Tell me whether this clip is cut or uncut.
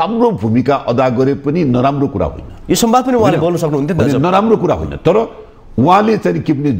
uncut